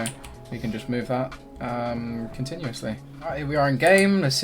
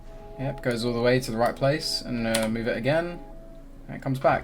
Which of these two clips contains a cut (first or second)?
first